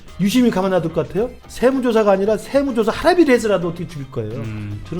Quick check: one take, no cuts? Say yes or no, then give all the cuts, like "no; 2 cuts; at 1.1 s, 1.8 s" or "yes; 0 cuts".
no; 1 cut; at 1.4 s